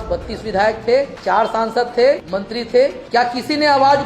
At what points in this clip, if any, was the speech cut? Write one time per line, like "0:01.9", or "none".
0:01.2
0:02.7